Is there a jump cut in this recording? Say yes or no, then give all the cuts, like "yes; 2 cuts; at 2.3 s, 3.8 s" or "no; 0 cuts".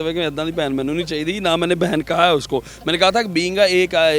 no; 0 cuts